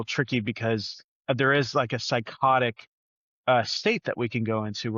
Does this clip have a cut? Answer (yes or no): no